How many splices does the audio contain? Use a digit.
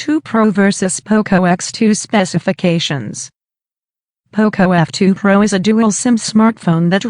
0